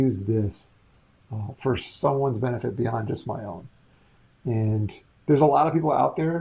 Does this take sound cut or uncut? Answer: uncut